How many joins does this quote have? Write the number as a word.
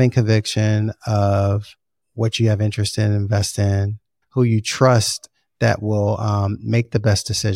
one